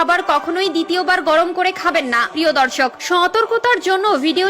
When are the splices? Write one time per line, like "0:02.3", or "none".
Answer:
0:02.3